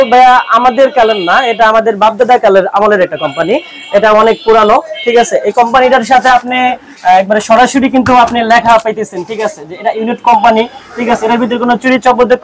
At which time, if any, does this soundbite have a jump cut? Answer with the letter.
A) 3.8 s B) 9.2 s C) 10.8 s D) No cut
D